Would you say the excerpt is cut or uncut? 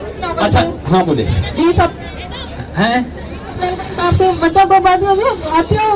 uncut